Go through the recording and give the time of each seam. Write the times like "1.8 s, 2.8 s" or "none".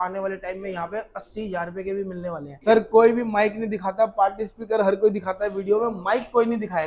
2.6 s